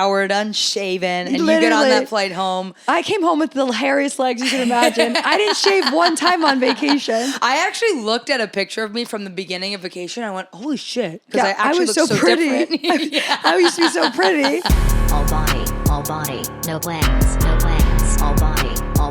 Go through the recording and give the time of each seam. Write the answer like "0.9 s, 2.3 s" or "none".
14.7 s